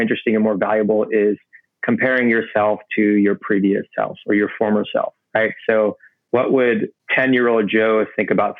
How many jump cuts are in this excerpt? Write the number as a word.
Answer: two